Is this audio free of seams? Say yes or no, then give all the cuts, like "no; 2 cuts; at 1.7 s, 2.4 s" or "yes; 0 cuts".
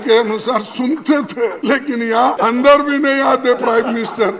no; 2 cuts; at 1.6 s, 2.4 s